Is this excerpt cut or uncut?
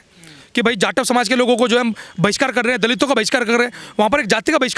uncut